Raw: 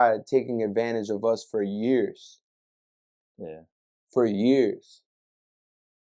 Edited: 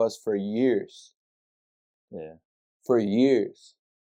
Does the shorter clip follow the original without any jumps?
yes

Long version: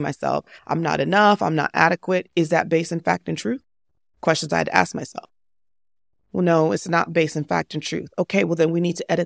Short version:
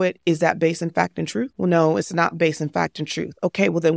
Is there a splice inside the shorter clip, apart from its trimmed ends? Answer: yes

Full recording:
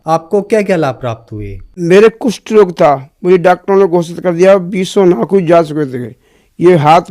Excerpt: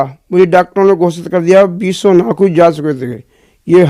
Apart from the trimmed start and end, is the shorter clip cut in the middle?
no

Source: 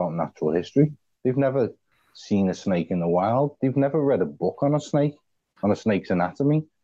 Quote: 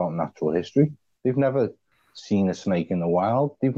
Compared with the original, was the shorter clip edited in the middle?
no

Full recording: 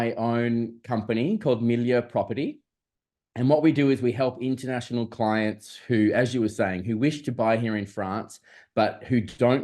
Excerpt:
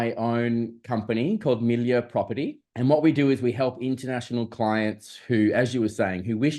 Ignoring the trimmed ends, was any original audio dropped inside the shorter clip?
yes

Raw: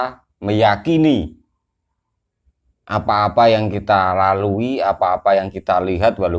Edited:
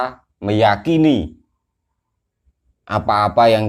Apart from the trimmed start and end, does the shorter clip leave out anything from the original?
no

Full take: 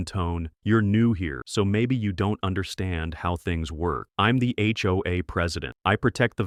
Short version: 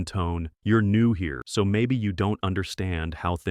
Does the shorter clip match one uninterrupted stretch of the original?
yes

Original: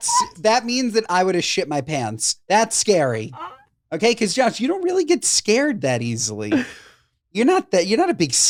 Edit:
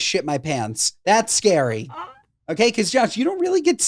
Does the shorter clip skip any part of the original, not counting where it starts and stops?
no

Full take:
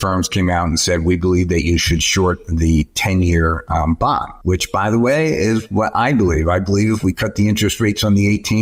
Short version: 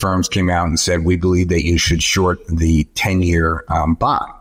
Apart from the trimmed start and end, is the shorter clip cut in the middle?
no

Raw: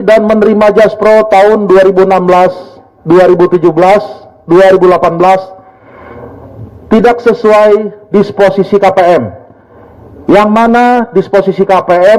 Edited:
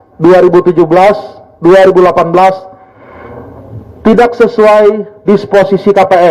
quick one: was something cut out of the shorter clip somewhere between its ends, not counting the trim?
no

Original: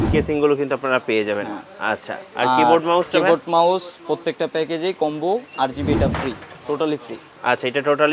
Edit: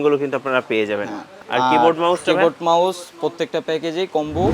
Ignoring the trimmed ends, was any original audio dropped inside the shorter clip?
yes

